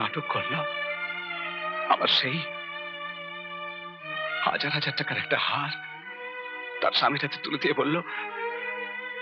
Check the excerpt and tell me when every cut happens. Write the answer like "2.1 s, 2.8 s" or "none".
none